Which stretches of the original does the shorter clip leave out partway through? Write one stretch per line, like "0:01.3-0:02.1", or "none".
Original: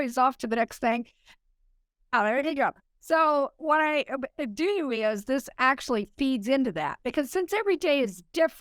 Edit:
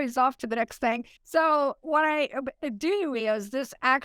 0:01.1-0:02.9